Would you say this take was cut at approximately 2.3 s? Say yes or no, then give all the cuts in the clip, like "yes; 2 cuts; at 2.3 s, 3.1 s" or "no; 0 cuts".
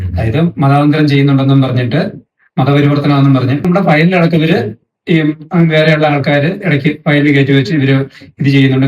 no; 1 cut; at 3.6 s